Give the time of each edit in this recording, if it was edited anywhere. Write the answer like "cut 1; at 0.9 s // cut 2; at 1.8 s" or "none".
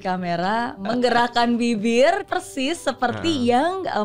cut 1; at 0.8 s // cut 2; at 2.2 s